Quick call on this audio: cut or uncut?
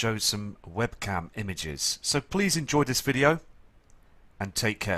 cut